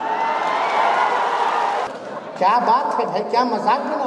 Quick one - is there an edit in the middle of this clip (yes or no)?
yes